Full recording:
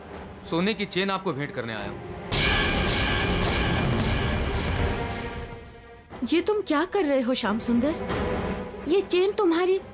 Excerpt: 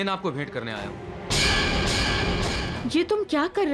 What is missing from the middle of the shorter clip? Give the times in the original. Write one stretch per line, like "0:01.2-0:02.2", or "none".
0:03.7-0:06.1